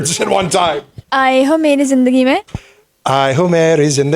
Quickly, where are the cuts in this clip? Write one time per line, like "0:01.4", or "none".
0:01.0